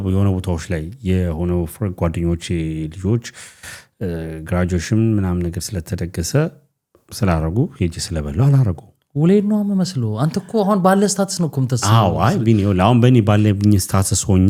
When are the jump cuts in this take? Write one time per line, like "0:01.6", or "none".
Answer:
none

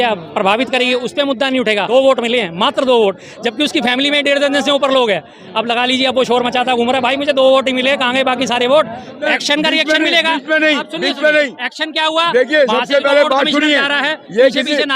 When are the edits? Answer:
0:01.9
0:09.2

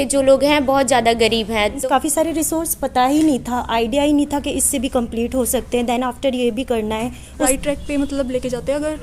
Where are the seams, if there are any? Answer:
0:01.8
0:07.5

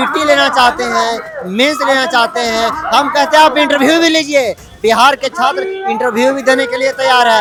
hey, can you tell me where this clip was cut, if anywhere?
none

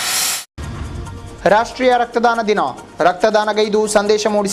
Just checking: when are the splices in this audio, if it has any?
0:01.3

